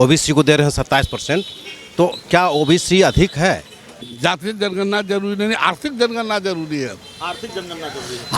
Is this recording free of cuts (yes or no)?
no